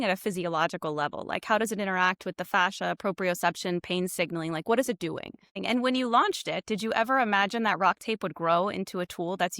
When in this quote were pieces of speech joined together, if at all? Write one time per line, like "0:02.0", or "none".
0:05.6